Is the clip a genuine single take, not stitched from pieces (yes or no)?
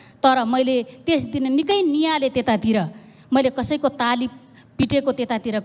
yes